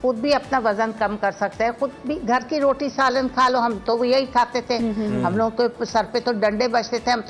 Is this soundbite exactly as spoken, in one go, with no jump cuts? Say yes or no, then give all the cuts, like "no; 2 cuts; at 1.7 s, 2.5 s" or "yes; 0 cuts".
yes; 0 cuts